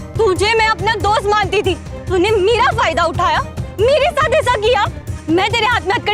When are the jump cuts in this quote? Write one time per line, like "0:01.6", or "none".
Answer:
0:05.2

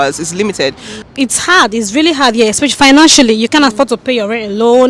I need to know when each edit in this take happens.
0:00.9

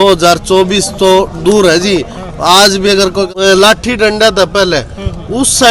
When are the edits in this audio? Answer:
0:03.3

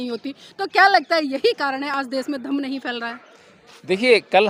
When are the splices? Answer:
none

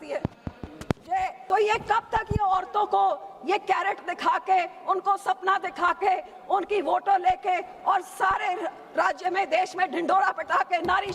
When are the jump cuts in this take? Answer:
0:01.4

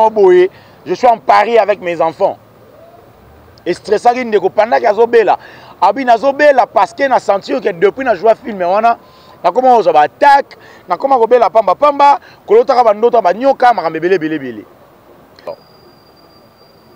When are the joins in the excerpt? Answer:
0:15.4

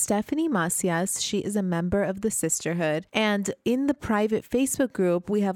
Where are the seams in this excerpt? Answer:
0:03.1

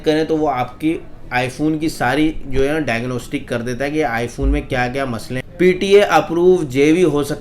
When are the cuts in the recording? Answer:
0:05.4

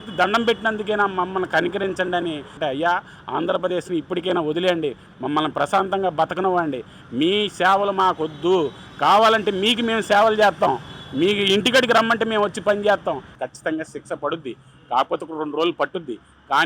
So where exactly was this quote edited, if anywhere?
0:02.5
0:13.3

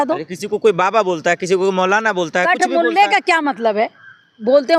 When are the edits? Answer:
none

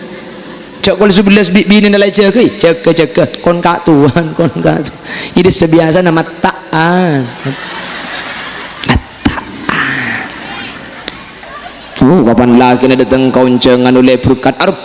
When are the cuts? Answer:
0:11.4

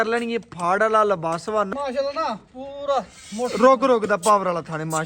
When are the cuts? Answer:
0:01.7

